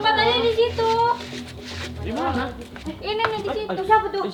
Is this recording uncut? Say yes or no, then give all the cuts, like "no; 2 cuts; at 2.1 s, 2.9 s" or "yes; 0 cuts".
yes; 0 cuts